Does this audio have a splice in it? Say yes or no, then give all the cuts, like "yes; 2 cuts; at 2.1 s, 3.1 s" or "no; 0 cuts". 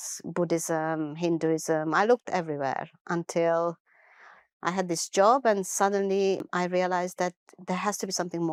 no; 0 cuts